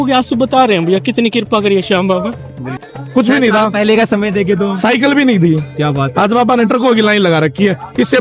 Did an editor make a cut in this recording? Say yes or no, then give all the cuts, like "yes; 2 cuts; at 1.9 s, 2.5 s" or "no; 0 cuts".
yes; 1 cut; at 2.7 s